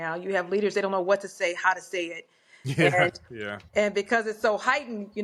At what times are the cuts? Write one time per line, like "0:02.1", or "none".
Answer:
none